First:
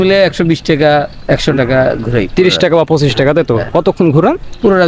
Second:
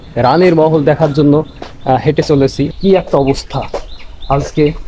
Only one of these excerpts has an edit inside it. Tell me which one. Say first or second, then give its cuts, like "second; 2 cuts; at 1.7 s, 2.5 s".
second; 1 cut; at 2.7 s